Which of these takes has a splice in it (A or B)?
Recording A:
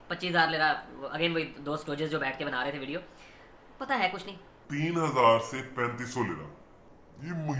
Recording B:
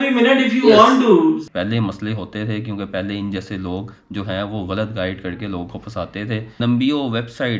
B